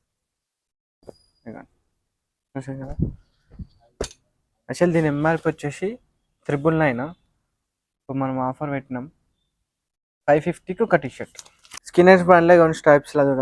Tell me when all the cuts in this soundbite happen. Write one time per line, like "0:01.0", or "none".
0:11.9